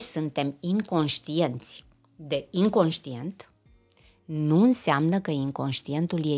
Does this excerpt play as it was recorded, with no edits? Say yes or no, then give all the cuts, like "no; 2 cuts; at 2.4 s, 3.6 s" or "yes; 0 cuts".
yes; 0 cuts